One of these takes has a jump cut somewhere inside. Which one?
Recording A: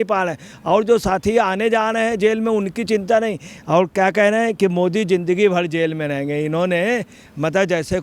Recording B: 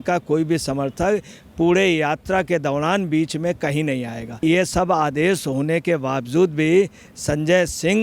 B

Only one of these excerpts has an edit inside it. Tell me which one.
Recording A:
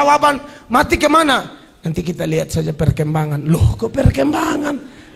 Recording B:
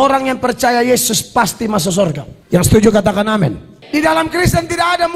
B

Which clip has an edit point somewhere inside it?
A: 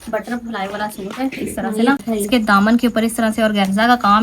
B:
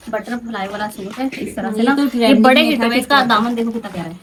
A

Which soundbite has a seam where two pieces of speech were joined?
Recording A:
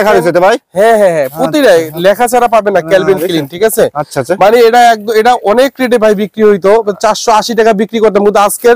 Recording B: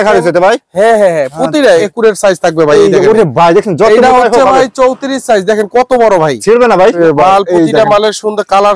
B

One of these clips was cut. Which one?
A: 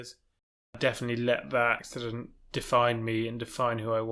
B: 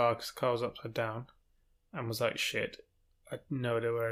A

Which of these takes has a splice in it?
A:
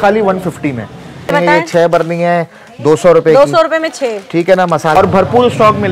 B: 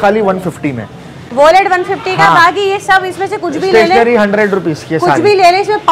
A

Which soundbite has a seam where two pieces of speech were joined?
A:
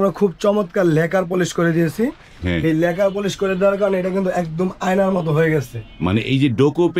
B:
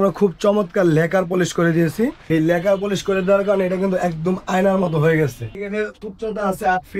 B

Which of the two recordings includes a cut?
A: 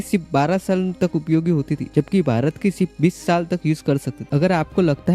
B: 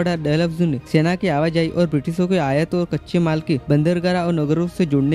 A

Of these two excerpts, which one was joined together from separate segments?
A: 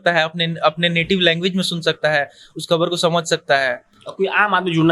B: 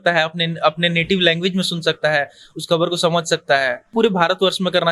B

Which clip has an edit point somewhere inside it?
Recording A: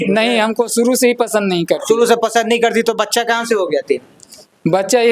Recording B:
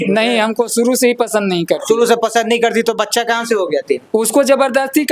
B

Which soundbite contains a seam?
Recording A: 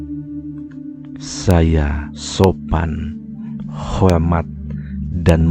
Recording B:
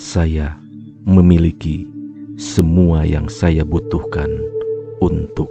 A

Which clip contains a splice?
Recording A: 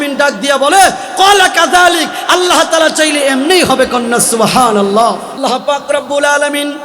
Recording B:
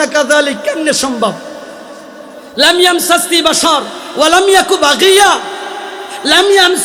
A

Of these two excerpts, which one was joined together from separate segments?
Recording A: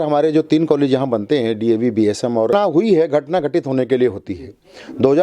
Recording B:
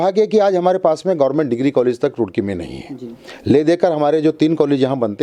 A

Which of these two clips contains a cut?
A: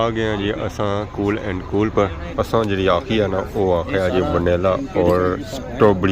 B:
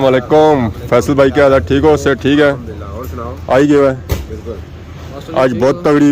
A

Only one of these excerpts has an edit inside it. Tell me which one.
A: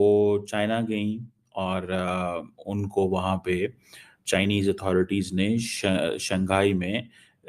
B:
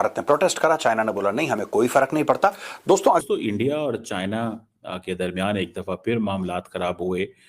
B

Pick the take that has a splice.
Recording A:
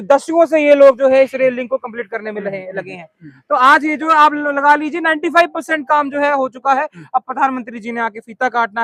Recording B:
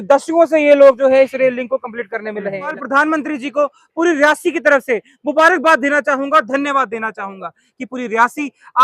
B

